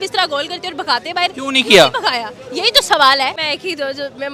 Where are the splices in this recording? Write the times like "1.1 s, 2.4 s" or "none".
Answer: 3.4 s